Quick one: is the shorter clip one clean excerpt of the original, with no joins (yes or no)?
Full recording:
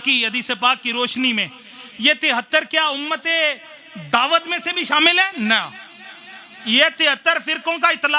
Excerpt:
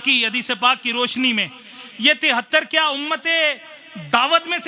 yes